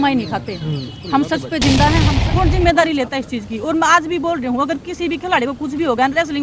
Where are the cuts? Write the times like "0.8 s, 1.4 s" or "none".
2.1 s